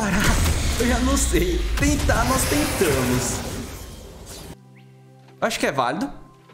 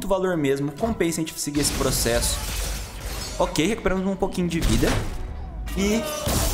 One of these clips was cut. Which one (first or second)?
first